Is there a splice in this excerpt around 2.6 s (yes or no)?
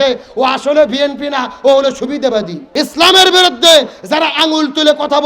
yes